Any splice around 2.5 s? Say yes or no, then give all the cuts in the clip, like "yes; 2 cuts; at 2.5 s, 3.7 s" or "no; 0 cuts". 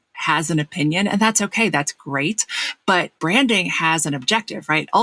no; 0 cuts